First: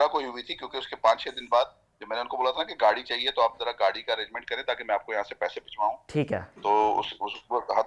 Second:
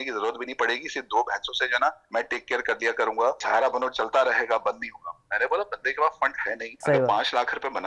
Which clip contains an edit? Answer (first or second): second